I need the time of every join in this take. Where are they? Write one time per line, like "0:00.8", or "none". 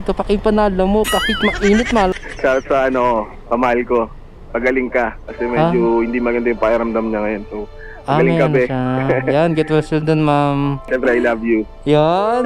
0:02.1
0:10.9